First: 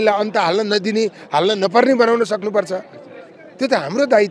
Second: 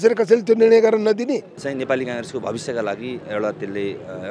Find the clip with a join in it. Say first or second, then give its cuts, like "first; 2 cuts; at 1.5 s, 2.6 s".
second; 1 cut; at 1.6 s